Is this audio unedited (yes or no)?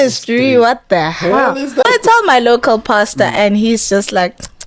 no